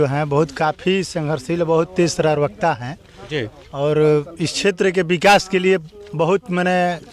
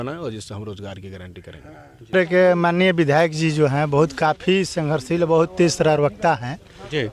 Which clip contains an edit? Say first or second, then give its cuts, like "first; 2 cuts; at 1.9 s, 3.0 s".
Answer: second; 1 cut; at 2.1 s